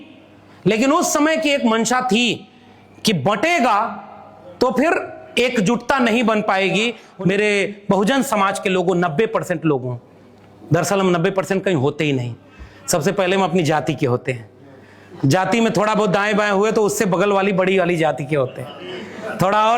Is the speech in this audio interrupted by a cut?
yes; 1 cut; at 7.0 s

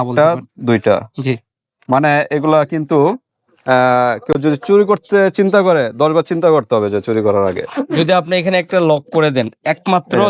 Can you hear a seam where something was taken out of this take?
no; 0 cuts

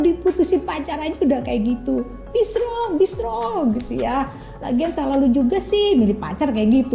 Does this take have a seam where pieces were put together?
no; 0 cuts

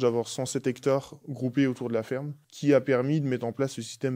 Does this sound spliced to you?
yes; 1 cut; at 2.4 s

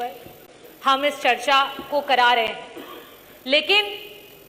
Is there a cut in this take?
no; 0 cuts

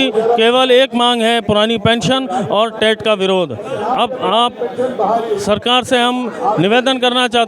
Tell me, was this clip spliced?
no; 0 cuts

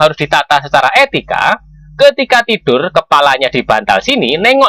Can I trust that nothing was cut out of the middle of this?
yes; 0 cuts

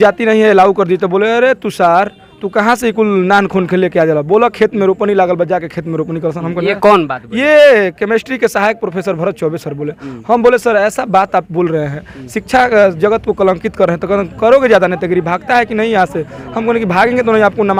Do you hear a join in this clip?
no; 0 cuts

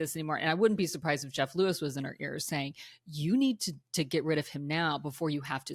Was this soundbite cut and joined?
no; 0 cuts

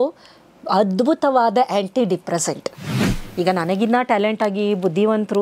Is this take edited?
yes; 1 cut; at 3.0 s

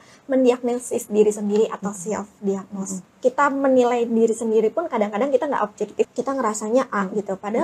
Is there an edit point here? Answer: yes; 2 cuts; at 3.0 s, 6.1 s

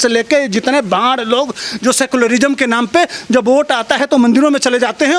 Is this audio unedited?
yes; 0 cuts

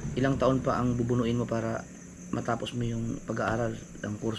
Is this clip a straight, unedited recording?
yes; 0 cuts

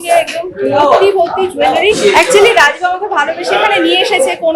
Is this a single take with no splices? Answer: no; 1 cut; at 2.0 s

